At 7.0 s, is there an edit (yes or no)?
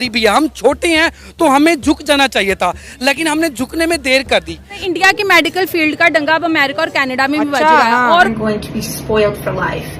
no